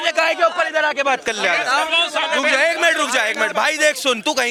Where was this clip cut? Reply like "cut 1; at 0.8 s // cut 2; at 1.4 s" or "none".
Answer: none